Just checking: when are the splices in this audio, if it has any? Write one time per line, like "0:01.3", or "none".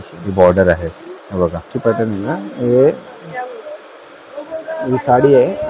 0:01.7